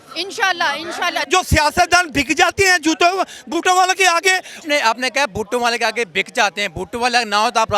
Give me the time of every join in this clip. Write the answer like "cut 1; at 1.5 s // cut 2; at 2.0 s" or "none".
cut 1; at 1.2 s // cut 2; at 4.6 s